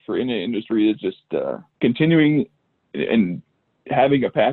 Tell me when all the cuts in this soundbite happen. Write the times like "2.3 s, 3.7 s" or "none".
1.6 s